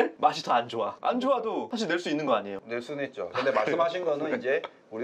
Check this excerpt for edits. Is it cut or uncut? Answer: cut